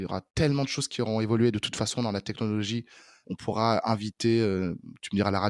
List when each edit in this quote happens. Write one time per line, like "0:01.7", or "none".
0:03.2